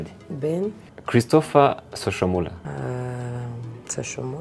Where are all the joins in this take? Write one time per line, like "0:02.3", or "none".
0:00.9
0:02.6